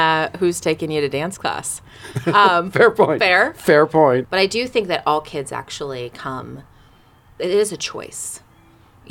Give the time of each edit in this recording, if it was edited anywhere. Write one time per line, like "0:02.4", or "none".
0:04.2